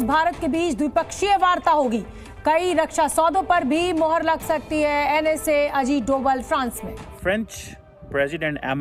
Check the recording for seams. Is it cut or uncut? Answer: cut